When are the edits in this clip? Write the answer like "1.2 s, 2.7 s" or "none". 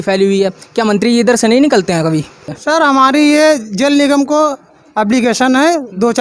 2.5 s